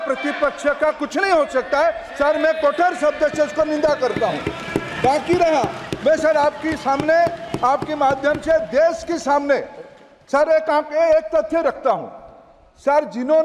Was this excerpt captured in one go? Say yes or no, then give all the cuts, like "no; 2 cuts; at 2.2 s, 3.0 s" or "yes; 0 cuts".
yes; 0 cuts